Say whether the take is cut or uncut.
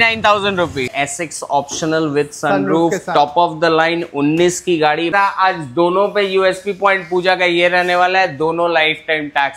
cut